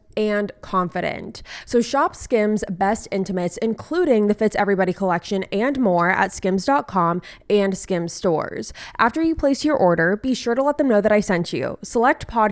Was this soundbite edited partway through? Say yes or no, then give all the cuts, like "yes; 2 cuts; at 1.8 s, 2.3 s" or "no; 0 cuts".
yes; 1 cut; at 1.5 s